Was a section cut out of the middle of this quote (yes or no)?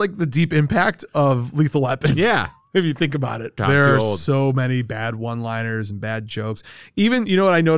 yes